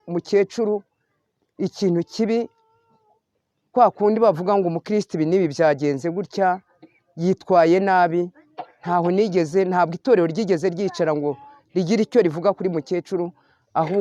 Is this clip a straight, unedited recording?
yes; 0 cuts

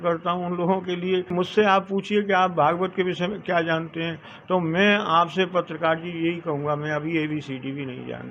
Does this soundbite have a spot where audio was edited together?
yes; 1 cut; at 1.5 s

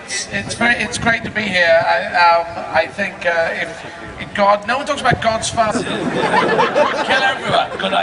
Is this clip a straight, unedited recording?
yes; 0 cuts

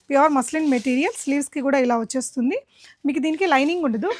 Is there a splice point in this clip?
no; 0 cuts

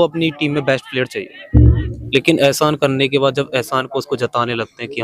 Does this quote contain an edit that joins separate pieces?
yes; 1 cut; at 1.9 s

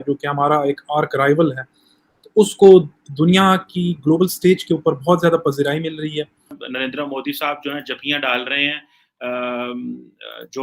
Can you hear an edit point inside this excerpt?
yes; 1 cut; at 6.6 s

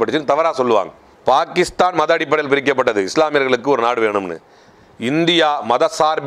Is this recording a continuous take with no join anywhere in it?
yes; 0 cuts

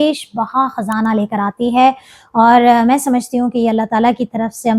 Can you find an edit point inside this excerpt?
no; 0 cuts

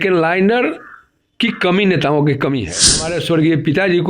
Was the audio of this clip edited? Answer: yes; 1 cut; at 3.1 s

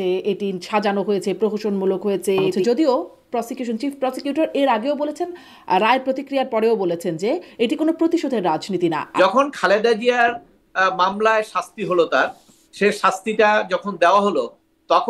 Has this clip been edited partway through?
yes; 2 cuts; at 2.6 s, 9.1 s

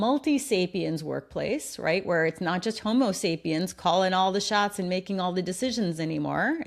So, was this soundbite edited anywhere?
no; 0 cuts

